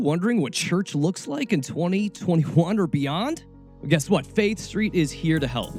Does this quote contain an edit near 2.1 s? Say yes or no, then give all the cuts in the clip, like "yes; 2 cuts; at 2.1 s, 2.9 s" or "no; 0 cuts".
no; 0 cuts